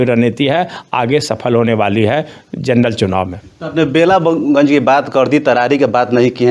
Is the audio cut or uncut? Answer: uncut